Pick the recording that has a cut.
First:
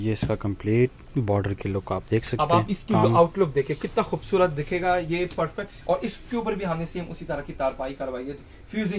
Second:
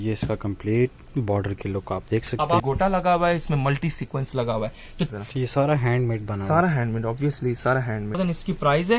second; 3 cuts; at 2.6 s, 5.1 s, 8.2 s

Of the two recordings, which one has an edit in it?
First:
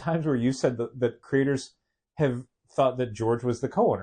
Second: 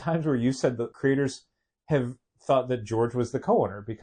second; 1 cut; at 0.9 s

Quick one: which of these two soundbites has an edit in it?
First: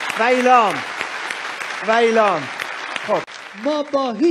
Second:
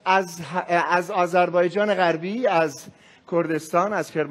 first; 1 cut; at 3.3 s

